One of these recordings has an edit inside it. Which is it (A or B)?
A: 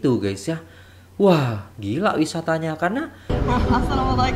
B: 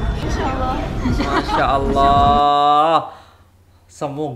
A